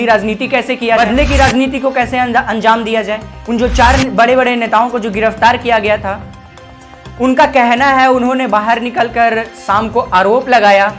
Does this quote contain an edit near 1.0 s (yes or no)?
yes